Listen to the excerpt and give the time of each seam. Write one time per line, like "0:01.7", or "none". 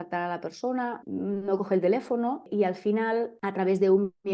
0:01.0
0:02.5
0:03.3